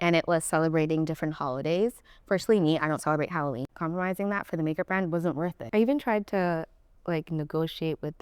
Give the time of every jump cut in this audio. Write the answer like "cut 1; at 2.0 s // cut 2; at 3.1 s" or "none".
cut 1; at 3.6 s // cut 2; at 5.6 s